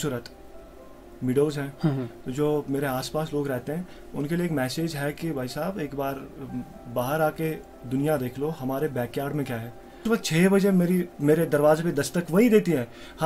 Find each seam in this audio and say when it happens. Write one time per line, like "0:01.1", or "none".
0:10.0